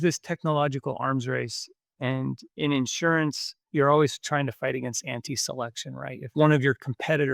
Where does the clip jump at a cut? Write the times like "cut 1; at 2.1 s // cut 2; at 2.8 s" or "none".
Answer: cut 1; at 3.5 s // cut 2; at 6.3 s